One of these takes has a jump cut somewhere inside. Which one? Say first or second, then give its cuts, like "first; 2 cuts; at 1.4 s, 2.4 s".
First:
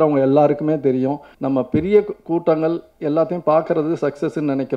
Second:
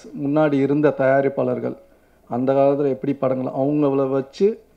first; 1 cut; at 1.3 s